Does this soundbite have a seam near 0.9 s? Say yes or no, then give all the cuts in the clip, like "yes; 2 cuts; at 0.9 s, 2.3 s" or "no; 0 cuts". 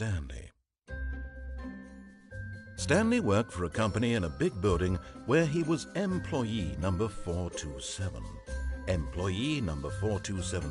no; 1 cut; at 2.9 s